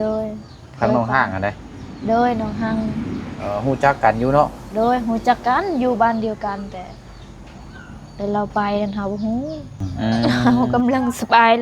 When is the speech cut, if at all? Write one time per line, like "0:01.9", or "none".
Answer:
0:10.4